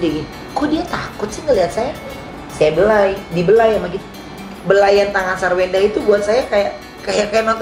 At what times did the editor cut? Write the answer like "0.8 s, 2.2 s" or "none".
2.4 s